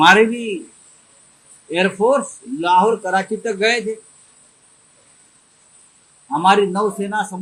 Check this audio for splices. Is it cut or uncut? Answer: uncut